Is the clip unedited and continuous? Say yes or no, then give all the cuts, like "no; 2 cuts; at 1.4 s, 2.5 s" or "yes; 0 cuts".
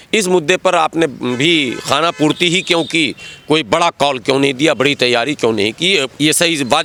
yes; 0 cuts